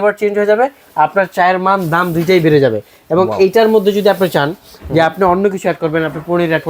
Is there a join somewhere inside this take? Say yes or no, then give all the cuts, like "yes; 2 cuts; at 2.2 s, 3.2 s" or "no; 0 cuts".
no; 0 cuts